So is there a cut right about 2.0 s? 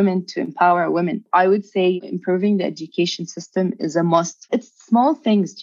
yes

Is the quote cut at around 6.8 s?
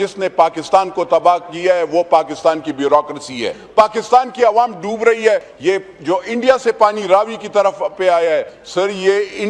no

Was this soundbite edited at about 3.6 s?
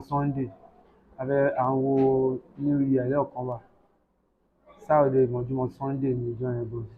no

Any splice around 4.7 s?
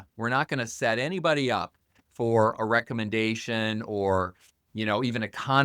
no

